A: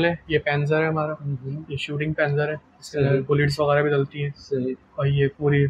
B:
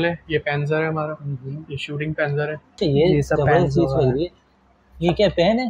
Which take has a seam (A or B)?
B